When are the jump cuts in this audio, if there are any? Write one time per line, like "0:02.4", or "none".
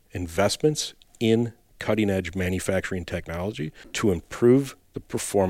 0:03.9